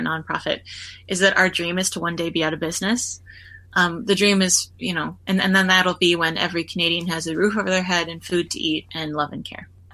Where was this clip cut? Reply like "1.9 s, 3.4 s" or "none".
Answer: none